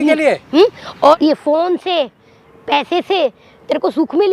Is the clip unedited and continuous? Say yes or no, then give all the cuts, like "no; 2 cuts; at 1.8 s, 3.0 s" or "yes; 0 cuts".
no; 1 cut; at 1.1 s